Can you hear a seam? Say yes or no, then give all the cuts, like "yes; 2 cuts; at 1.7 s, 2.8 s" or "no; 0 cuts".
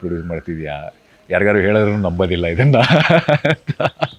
no; 0 cuts